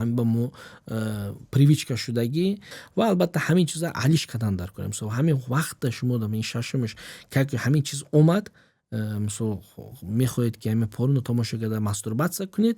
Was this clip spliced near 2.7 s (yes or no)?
yes